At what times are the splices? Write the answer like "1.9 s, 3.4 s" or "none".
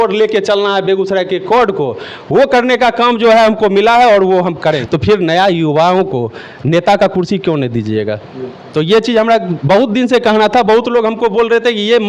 4.8 s

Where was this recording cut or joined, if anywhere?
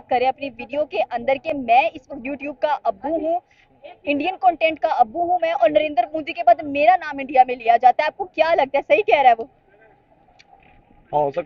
none

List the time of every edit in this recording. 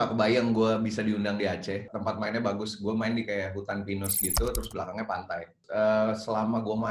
1.9 s, 5.6 s

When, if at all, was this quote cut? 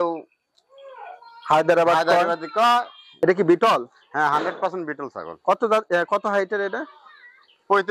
3.0 s

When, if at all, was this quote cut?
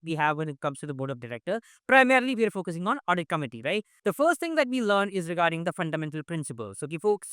3.9 s

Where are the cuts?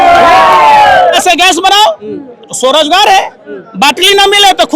1.0 s

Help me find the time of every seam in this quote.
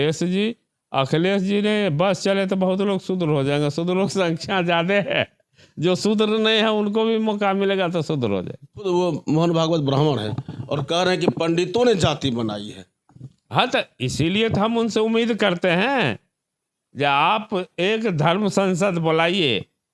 8.7 s

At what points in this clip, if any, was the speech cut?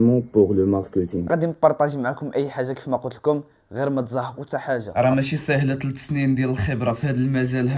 1.2 s, 4.9 s

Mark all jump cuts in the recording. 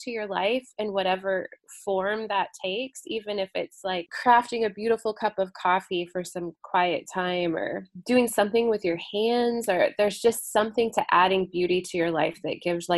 4.1 s

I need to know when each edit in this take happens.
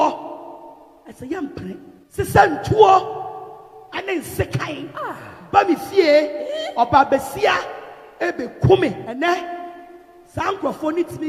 2.0 s, 9.0 s

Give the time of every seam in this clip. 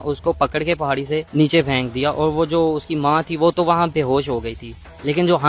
1.3 s

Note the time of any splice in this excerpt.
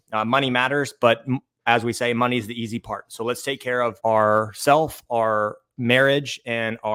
none

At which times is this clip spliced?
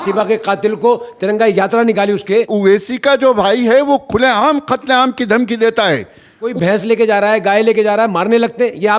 2.5 s, 6.5 s

